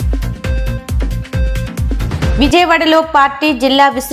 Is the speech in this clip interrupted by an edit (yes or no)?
no